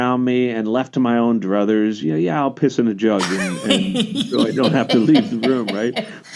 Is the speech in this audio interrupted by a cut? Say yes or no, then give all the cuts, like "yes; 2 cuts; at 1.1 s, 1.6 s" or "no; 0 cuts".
no; 0 cuts